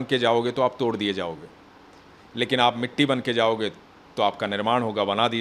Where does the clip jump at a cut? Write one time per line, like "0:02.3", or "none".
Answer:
none